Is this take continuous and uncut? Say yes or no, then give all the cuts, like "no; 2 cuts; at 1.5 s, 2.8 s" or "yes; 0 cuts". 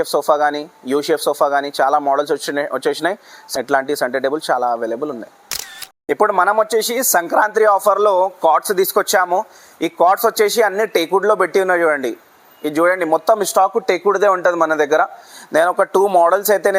yes; 0 cuts